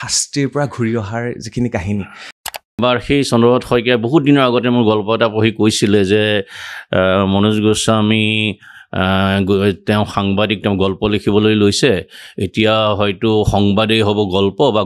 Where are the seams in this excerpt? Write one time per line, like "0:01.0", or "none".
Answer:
0:02.7